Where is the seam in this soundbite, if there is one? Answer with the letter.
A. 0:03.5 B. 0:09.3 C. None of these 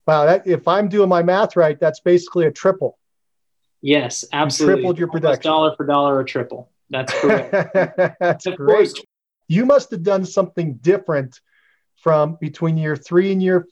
B